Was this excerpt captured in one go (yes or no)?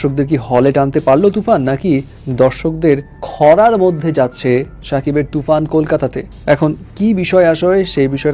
yes